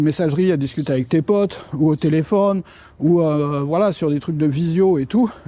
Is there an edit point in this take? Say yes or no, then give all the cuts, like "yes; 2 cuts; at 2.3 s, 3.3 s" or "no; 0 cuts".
no; 0 cuts